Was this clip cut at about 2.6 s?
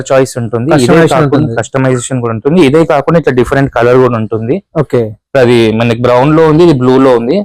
no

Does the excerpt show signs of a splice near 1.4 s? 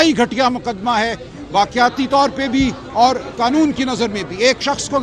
no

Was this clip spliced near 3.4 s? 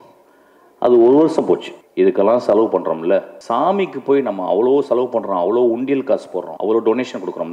yes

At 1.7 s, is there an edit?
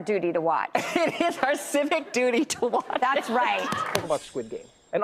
no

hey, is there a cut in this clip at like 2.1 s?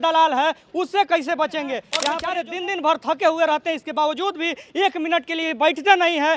yes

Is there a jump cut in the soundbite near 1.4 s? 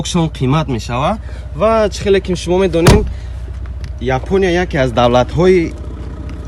no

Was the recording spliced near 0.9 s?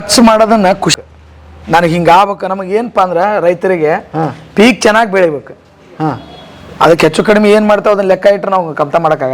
yes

